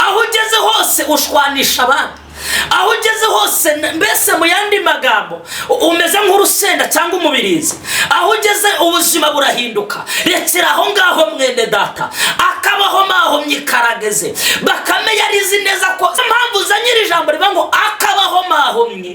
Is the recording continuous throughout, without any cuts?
no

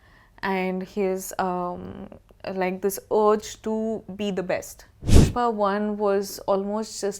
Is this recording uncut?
no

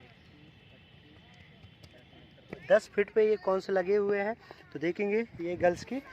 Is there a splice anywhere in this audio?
yes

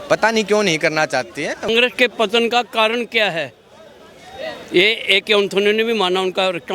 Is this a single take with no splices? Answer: no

